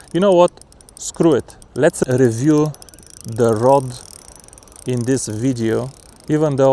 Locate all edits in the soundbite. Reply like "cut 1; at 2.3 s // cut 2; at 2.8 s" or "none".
cut 1; at 2.0 s